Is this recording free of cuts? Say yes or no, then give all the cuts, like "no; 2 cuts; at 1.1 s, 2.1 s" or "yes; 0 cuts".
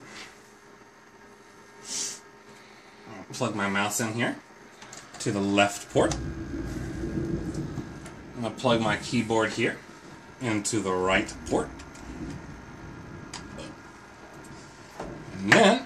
no; 1 cut; at 5.2 s